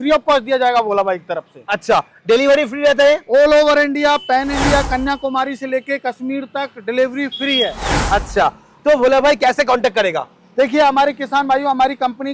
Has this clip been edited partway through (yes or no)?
no